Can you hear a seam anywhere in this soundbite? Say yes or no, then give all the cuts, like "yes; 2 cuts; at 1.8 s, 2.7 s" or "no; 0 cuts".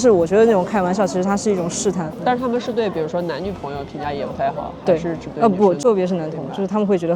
yes; 2 cuts; at 2.1 s, 5.8 s